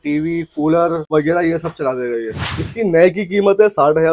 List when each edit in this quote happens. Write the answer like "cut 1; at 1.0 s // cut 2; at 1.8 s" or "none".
cut 1; at 1.1 s // cut 2; at 2.5 s